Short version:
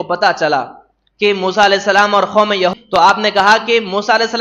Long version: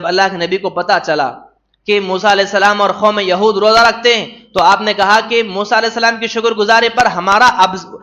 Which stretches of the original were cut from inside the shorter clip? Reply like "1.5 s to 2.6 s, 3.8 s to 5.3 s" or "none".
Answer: 3.4 s to 4.3 s